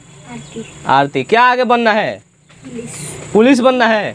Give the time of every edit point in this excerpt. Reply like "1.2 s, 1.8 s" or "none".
none